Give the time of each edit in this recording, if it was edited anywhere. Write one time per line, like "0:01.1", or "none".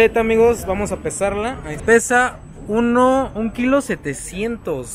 0:01.8